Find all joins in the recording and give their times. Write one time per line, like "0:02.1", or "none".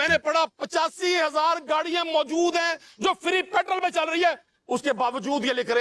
none